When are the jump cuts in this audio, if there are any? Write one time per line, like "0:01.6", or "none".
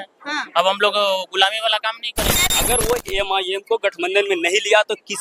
0:02.5